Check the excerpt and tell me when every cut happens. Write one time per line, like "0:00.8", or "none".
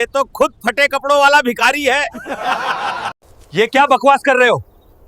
0:03.2